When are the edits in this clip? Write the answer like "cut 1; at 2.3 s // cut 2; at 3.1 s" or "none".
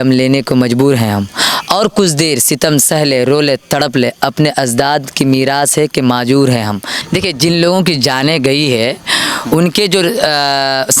cut 1; at 6.9 s